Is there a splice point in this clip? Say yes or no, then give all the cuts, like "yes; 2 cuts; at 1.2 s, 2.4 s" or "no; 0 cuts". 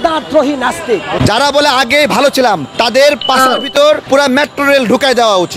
yes; 3 cuts; at 1.2 s, 2.7 s, 4.0 s